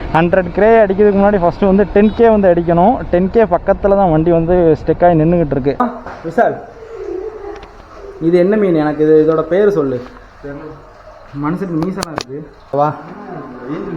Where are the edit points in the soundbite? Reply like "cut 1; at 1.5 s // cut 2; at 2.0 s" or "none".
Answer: cut 1; at 5.8 s // cut 2; at 12.7 s